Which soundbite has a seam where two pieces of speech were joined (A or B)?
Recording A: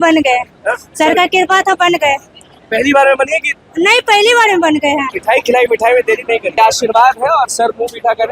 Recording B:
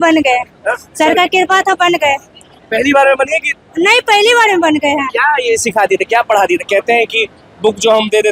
A